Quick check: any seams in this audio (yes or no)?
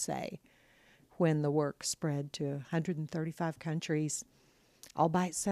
yes